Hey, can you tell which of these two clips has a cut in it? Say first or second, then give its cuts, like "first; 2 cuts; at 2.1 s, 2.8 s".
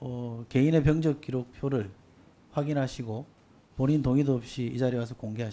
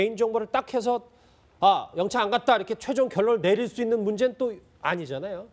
first; 1 cut; at 4.3 s